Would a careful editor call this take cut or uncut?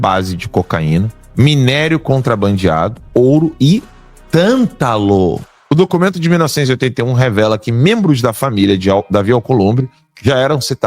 cut